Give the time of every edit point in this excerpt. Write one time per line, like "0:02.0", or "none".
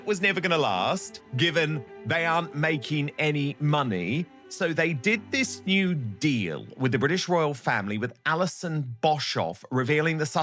0:01.2
0:01.9